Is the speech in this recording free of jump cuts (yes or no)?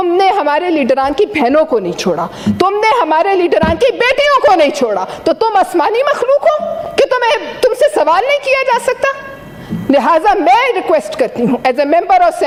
yes